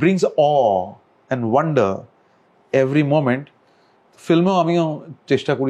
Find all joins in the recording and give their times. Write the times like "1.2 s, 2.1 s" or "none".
none

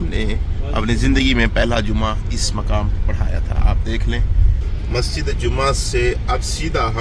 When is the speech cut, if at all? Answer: none

